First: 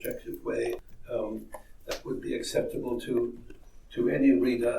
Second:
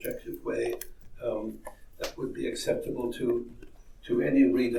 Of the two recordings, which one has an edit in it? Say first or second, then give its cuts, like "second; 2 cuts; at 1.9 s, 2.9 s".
first; 1 cut; at 0.9 s